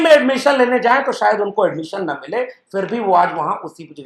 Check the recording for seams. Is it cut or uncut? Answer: uncut